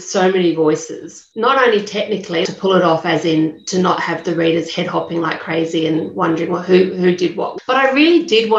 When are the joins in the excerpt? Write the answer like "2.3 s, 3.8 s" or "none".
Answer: 2.5 s, 7.4 s